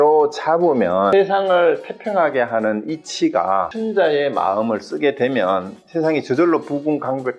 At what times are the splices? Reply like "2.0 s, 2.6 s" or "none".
1.1 s, 3.7 s